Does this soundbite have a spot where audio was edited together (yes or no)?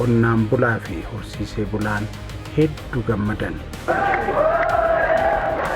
yes